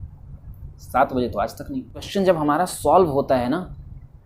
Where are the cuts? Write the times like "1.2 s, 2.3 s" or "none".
2.1 s